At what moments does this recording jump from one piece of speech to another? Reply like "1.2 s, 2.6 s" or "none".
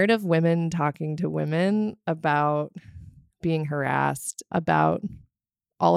none